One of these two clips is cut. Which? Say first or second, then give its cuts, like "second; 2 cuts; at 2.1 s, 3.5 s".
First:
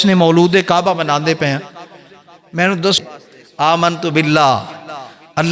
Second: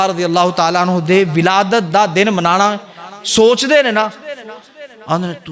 first; 1 cut; at 3.0 s